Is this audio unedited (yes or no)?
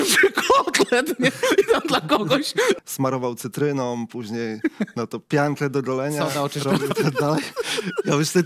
no